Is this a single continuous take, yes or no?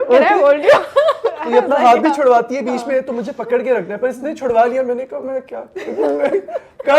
yes